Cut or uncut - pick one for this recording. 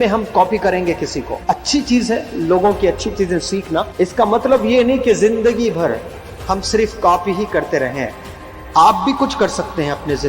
cut